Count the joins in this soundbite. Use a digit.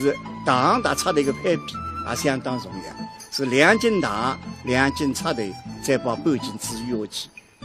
0